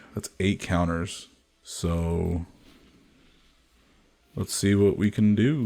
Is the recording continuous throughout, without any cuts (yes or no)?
no